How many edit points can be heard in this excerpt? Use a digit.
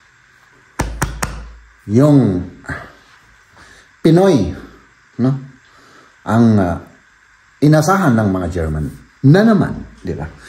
0